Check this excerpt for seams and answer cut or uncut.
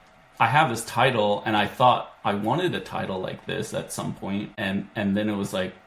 cut